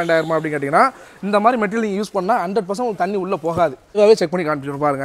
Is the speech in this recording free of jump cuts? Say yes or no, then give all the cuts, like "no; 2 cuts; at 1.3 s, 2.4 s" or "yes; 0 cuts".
no; 1 cut; at 4.0 s